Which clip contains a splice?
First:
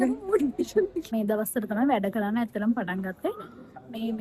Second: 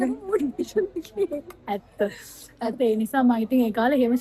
first; 1 cut; at 1.1 s

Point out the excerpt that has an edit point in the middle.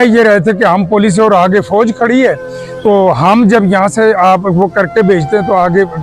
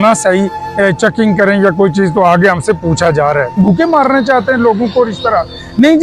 second; 1 cut; at 3.6 s

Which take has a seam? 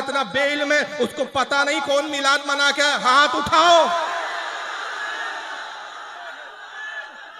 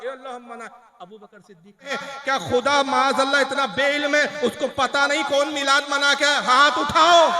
second; 1 cut; at 2.0 s

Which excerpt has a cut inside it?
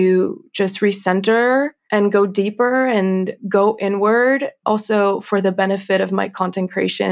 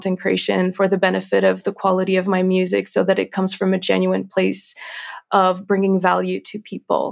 first; 3 cuts; at 1.8 s, 3.4 s, 4.6 s

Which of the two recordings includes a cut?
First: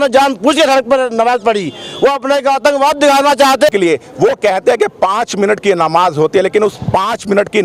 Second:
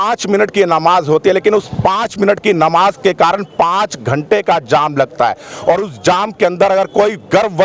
first; 1 cut; at 3.7 s

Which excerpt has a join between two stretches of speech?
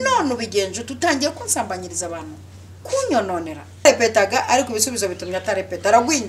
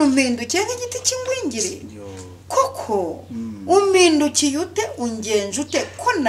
first; 1 cut; at 3.8 s

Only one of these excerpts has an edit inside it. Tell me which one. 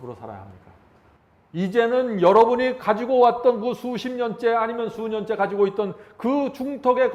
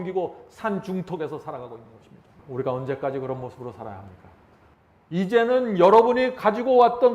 second; 1 cut; at 2.3 s

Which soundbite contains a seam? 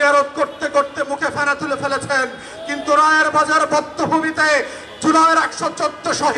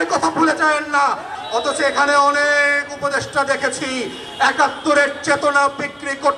second; 1 cut; at 1.3 s

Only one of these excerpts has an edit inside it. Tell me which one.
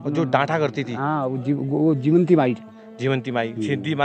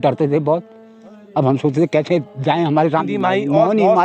second; 1 cut; at 3.0 s

